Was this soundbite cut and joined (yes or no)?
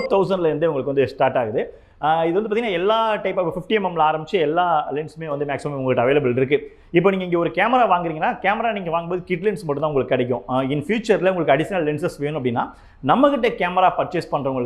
no